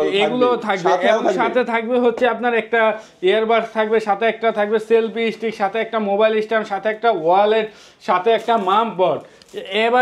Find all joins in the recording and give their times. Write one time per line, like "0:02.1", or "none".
none